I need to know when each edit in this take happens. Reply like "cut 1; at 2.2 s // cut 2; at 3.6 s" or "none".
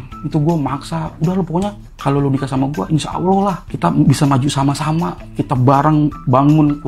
cut 1; at 1.9 s // cut 2; at 3.7 s

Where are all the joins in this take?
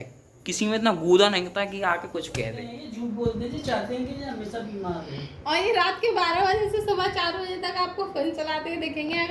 cut 1; at 2.8 s

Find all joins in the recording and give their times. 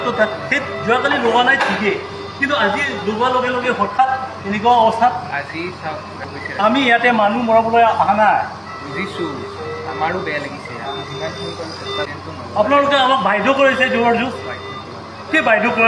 cut 1; at 6.2 s // cut 2; at 12.1 s

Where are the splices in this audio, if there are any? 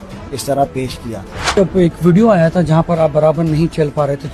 cut 1; at 1.6 s

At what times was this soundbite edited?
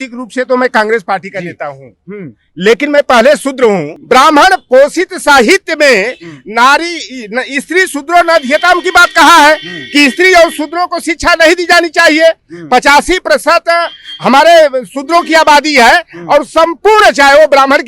cut 1; at 3.9 s

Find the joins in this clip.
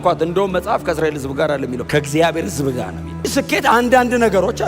cut 1; at 1.8 s // cut 2; at 3.2 s

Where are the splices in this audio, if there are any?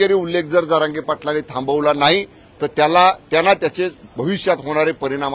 none

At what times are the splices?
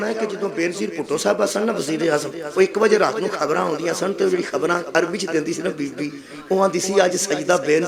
none

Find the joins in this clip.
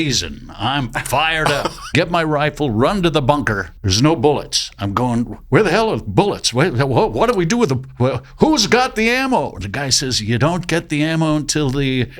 cut 1; at 1.8 s // cut 2; at 3.7 s

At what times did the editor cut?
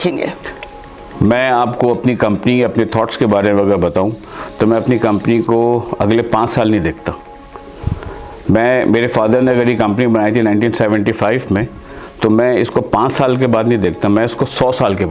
none

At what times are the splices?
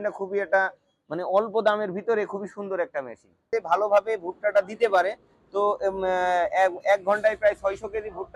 cut 1; at 3.3 s

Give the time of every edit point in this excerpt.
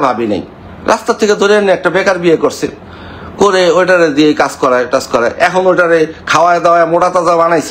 none

